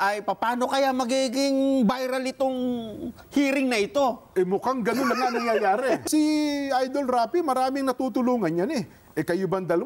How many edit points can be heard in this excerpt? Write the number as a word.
one